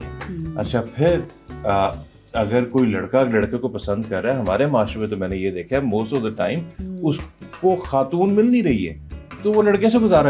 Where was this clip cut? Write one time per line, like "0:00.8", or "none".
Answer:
none

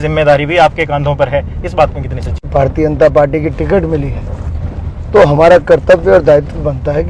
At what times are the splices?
0:02.5

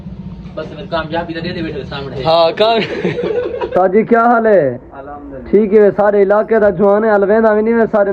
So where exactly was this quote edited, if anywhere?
0:03.7

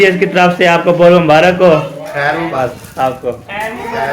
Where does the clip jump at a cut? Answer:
0:02.5

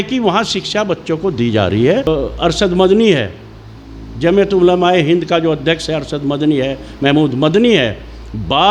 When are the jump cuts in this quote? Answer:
0:02.1

